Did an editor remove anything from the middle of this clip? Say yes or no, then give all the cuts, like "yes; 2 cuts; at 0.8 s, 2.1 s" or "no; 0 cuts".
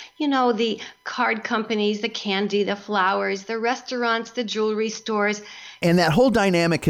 yes; 1 cut; at 5.8 s